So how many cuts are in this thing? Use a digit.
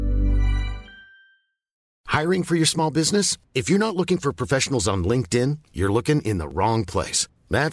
1